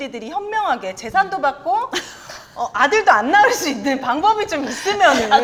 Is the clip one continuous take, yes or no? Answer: yes